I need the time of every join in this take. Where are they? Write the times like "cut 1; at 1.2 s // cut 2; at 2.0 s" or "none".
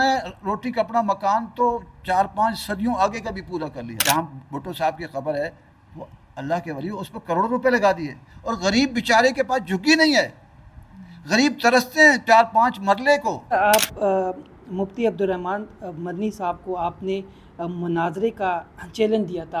cut 1; at 3.9 s // cut 2; at 13.5 s